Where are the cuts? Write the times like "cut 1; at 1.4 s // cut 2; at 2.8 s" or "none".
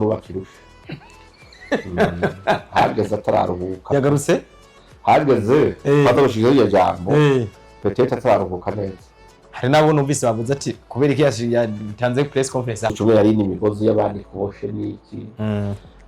cut 1; at 12.9 s